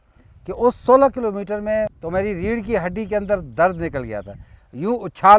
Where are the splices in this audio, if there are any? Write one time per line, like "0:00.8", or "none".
0:02.0